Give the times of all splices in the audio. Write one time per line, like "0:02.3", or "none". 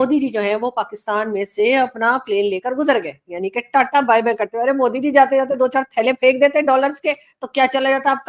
none